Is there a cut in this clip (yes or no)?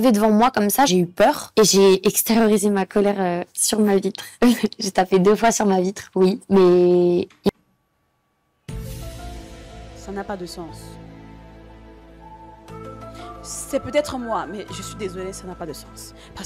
no